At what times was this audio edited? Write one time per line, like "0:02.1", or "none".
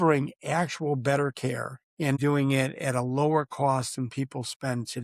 0:02.2